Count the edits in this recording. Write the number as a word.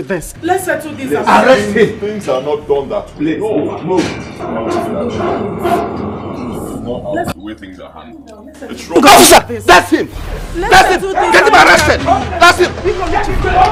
zero